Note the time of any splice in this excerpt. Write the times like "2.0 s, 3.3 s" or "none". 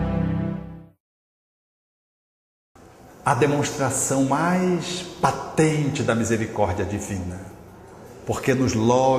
none